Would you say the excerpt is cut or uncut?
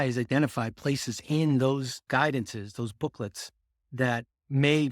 cut